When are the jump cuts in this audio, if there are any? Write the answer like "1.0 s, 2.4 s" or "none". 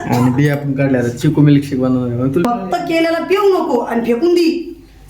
2.4 s